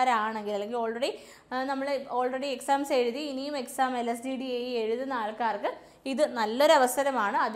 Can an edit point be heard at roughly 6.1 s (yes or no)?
no